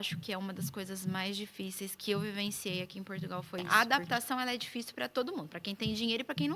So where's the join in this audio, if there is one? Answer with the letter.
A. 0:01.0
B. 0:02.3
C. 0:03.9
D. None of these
C